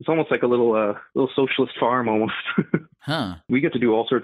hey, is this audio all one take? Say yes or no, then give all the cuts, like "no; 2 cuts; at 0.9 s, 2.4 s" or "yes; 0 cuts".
no; 2 cuts; at 1.0 s, 3.5 s